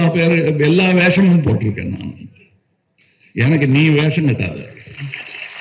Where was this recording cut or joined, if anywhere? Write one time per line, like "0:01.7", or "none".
none